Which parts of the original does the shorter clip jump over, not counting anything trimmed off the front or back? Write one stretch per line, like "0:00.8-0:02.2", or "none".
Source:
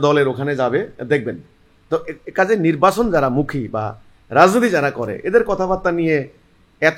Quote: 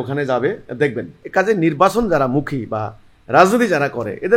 0:01.5-0:02.2